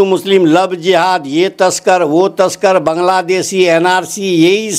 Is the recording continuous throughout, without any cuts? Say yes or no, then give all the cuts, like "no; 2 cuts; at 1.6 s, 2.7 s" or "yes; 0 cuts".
yes; 0 cuts